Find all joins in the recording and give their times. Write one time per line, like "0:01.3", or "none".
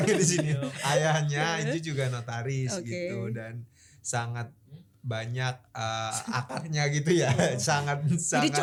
none